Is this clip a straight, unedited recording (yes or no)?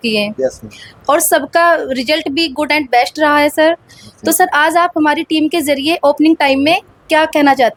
yes